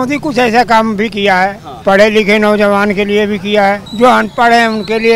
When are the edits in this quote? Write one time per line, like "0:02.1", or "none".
0:01.7
0:03.9